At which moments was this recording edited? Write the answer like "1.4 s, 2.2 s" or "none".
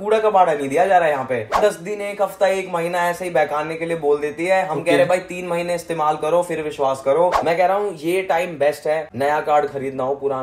1.6 s, 7.4 s